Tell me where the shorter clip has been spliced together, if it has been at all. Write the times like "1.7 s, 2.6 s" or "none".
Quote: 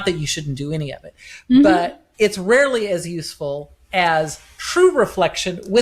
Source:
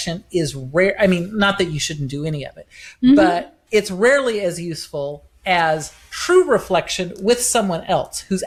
none